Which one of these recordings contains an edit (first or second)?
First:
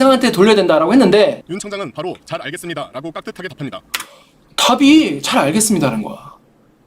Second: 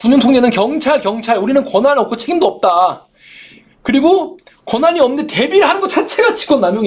first